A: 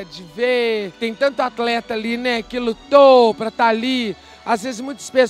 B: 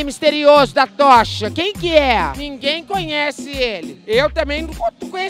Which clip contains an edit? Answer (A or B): B